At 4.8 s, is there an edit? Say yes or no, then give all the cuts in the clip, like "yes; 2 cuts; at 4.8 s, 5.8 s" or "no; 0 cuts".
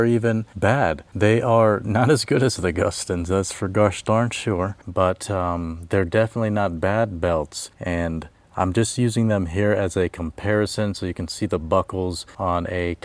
no; 0 cuts